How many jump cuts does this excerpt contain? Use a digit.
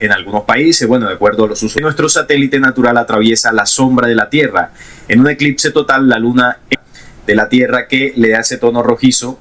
2